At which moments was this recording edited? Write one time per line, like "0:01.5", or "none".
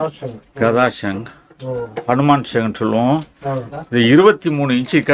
none